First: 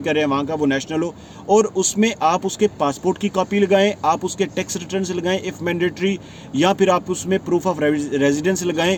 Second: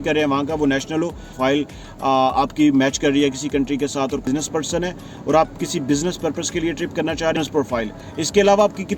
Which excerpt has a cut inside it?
second; 3 cuts; at 1.3 s, 4.3 s, 7.4 s

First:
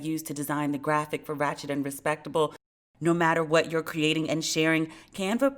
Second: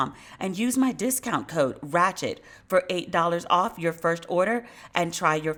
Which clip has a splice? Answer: first; 1 cut; at 2.7 s

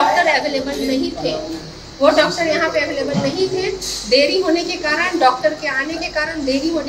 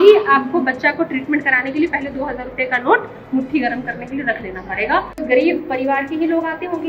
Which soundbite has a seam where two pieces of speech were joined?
second; 1 cut; at 5.2 s

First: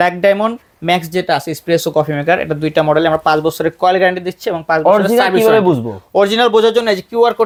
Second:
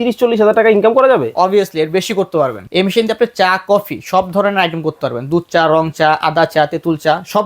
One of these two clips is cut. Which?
second; 1 cut; at 2.6 s

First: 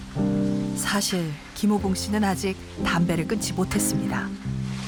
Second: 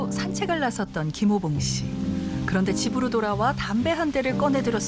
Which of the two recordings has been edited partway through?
second; 1 cut; at 2.0 s

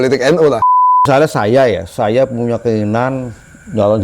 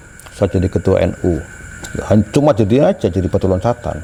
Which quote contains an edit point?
first; 1 cut; at 1.1 s

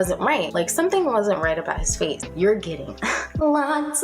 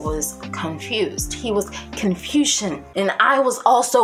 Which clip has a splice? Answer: first; 1 cut; at 2.2 s

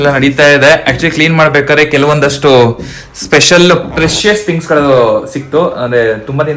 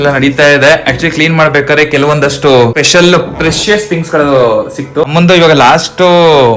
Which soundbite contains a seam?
second; 2 cuts; at 2.8 s, 5.1 s

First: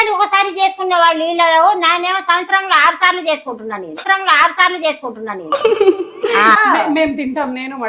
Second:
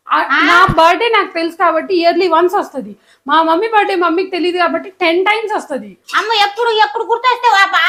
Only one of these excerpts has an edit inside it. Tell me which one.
first; 1 cut; at 6.6 s

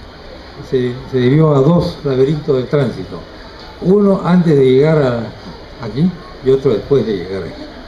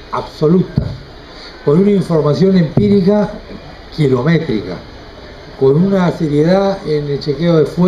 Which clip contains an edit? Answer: first; 1 cut; at 1.8 s

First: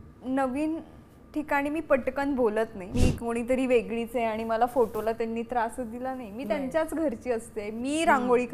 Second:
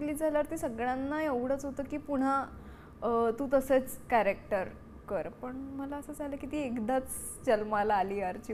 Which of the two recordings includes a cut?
first; 1 cut; at 2.8 s

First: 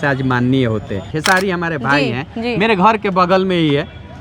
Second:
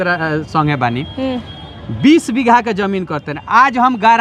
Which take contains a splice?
first; 1 cut; at 1.1 s

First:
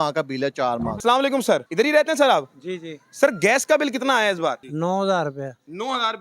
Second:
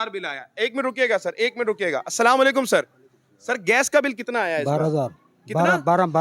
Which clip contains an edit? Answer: first; 3 cuts; at 1.0 s, 1.7 s, 4.7 s

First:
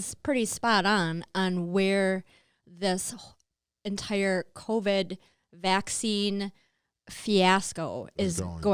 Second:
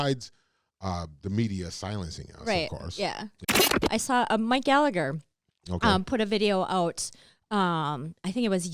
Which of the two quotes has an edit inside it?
second; 1 cut; at 3.4 s

